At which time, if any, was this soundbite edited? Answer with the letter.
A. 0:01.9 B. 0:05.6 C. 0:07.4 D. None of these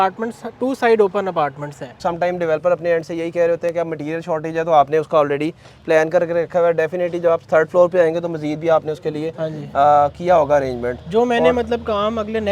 A